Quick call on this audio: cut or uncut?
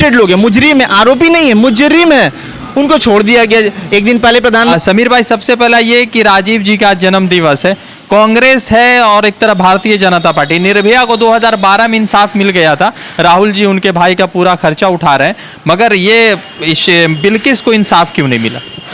uncut